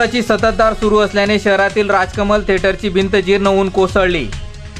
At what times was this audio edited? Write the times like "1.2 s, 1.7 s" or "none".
none